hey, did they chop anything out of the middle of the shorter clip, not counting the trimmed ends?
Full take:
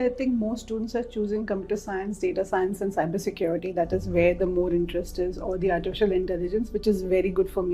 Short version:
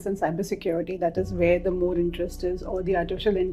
no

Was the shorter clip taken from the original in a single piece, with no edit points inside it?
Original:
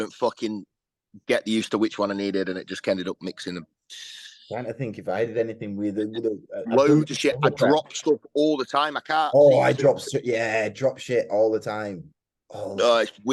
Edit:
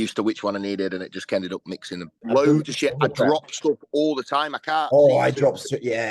no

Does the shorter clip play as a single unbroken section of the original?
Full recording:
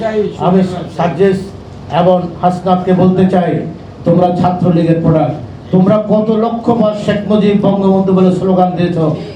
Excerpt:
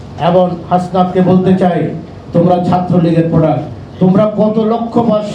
yes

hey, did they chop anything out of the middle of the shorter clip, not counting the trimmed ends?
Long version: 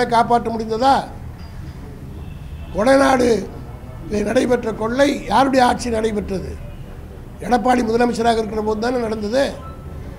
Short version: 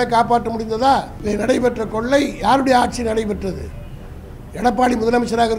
yes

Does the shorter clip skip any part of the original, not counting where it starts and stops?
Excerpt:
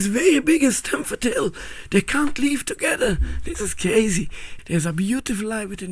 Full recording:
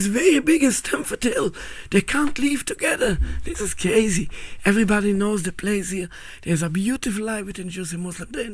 yes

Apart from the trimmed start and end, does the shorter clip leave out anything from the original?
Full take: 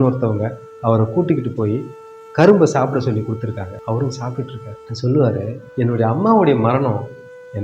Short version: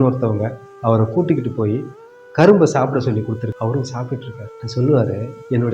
yes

